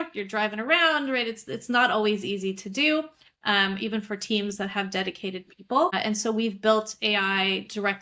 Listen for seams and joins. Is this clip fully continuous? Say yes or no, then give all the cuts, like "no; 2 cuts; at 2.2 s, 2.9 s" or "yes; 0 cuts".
no; 1 cut; at 5.9 s